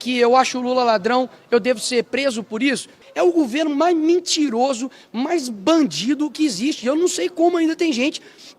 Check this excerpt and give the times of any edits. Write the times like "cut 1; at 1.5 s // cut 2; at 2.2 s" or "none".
cut 1; at 3.0 s